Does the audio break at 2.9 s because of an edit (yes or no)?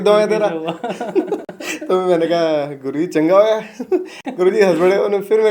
no